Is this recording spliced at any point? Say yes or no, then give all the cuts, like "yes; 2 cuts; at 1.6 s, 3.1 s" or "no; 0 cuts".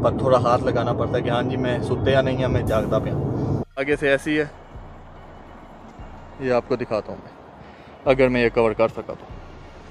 yes; 1 cut; at 3.8 s